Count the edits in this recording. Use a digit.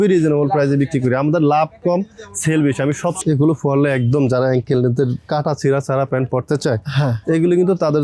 1